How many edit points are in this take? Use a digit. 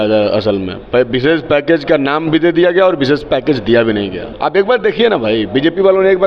1